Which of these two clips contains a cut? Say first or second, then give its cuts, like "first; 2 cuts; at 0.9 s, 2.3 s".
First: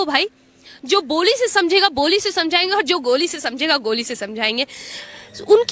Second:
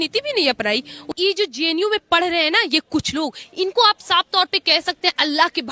second; 1 cut; at 0.9 s